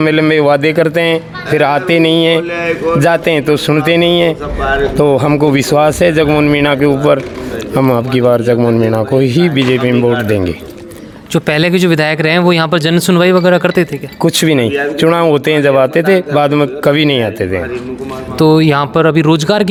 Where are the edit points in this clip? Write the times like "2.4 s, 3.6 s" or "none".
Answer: none